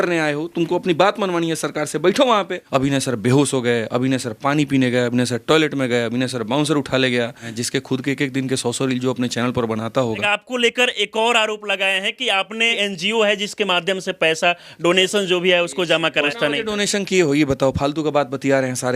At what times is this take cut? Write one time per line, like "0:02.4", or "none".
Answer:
0:02.6
0:07.5
0:10.2
0:12.7
0:16.3